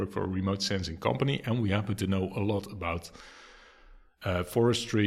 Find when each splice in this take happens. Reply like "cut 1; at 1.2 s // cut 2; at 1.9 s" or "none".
none